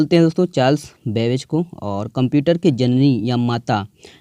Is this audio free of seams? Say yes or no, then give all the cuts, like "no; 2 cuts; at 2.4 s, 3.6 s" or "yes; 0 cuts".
yes; 0 cuts